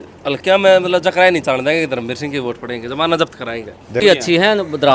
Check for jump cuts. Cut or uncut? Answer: cut